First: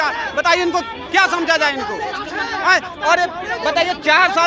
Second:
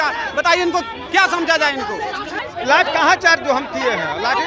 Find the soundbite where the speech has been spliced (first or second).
second